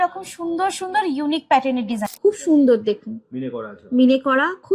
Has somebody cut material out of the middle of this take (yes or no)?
yes